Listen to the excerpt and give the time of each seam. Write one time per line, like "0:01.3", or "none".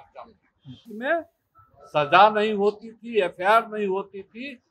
0:00.9